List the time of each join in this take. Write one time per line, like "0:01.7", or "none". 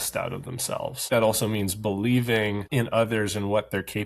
0:01.1
0:02.7